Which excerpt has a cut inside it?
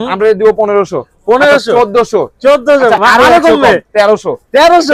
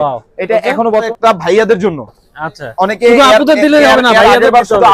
second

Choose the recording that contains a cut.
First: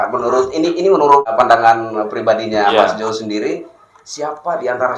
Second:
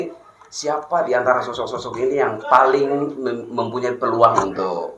first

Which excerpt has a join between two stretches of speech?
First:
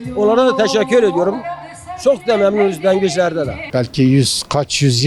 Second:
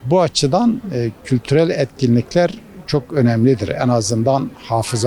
first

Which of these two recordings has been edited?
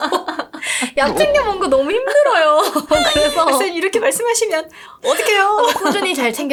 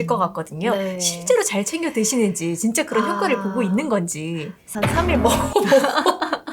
second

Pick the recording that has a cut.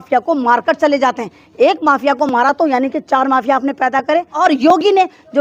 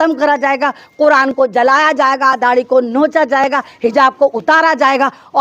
first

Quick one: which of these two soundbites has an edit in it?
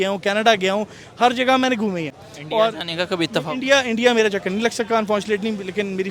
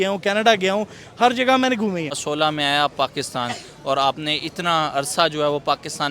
second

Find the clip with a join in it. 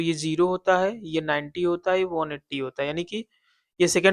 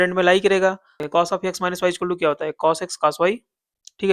second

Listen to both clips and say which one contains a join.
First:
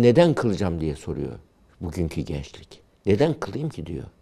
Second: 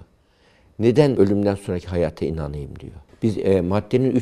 second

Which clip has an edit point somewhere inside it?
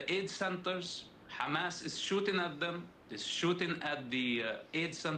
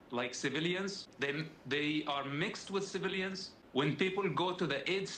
second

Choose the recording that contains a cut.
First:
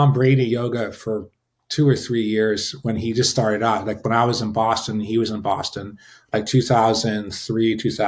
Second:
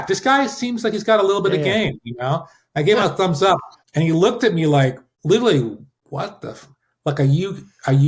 second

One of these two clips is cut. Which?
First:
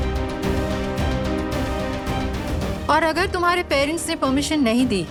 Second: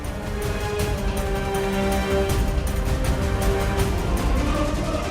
second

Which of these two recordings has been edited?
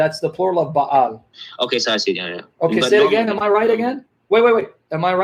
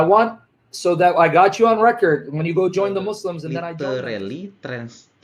second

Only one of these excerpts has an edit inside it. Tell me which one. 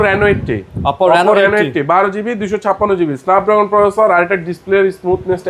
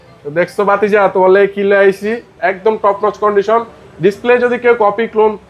second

